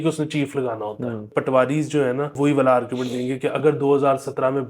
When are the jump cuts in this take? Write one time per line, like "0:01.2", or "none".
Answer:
0:01.3
0:02.3

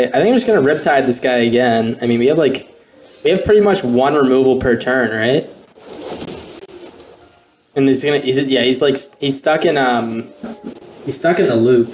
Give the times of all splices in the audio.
none

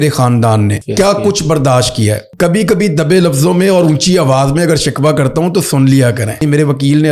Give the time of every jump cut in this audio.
0:00.8
0:02.2
0:06.4

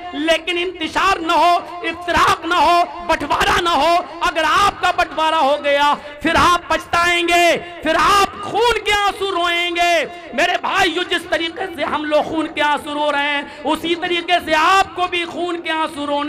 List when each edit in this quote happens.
0:06.1

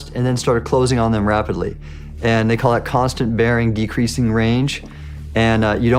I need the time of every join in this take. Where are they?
none

